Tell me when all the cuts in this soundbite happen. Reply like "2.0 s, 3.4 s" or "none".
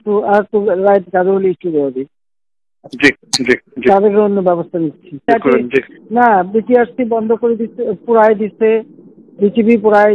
5.3 s